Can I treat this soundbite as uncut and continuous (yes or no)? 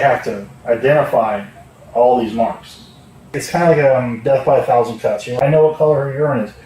no